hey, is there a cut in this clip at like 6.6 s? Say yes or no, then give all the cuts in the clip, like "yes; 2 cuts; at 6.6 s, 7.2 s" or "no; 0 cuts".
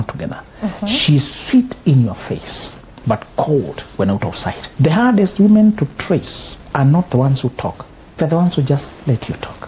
no; 1 cut; at 4.6 s